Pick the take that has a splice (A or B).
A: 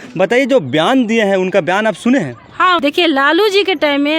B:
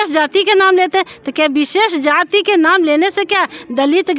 A